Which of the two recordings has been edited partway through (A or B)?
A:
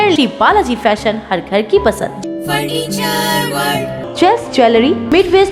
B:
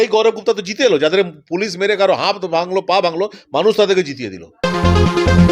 B